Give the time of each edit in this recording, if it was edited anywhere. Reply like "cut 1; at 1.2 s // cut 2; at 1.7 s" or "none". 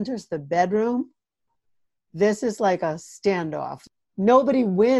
cut 1; at 3.8 s